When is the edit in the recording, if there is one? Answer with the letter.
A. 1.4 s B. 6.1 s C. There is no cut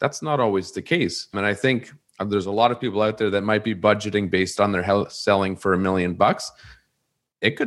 A